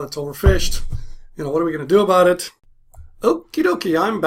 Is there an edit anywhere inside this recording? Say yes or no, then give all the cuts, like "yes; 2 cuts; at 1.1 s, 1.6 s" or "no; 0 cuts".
no; 0 cuts